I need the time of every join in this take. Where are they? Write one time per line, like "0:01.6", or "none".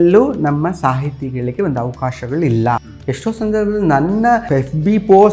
0:02.9
0:04.4